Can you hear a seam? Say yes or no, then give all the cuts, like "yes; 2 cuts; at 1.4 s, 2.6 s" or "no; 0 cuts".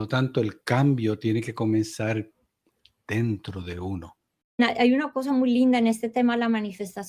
yes; 1 cut; at 4.6 s